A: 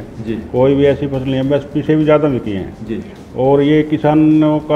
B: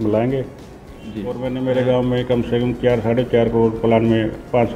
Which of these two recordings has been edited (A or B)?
B